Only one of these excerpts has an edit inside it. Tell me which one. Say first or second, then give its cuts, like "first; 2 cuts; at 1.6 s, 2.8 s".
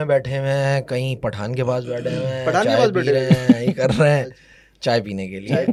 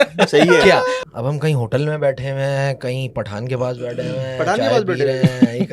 second; 1 cut; at 1.0 s